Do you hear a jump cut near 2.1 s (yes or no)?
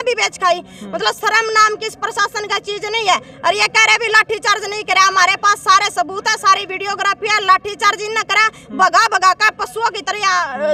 no